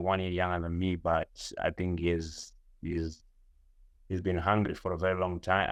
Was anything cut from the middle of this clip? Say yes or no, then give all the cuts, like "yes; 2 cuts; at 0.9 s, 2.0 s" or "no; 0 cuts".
no; 0 cuts